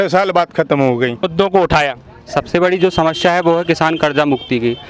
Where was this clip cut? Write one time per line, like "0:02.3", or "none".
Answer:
0:01.3